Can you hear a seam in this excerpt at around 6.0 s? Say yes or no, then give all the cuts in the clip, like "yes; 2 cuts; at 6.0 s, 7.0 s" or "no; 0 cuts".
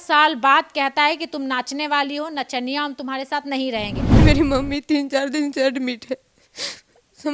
no; 1 cut; at 4.2 s